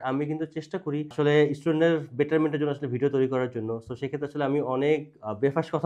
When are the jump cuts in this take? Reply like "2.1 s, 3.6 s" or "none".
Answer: none